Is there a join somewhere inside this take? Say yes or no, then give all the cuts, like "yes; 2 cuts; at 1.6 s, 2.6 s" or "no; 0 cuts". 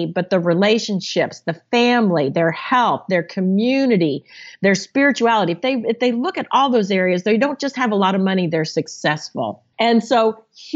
yes; 1 cut; at 9.6 s